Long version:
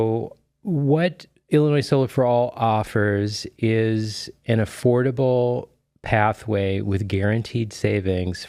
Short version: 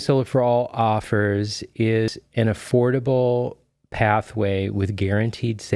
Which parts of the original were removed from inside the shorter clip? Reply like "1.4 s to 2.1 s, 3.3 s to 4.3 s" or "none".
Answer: 3.9 s to 4.2 s